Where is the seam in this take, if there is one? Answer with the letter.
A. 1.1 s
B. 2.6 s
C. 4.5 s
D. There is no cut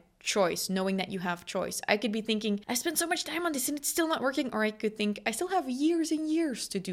B